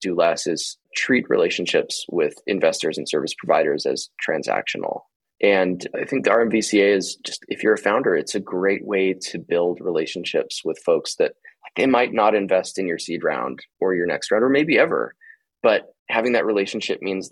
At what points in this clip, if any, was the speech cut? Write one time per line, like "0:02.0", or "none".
0:00.9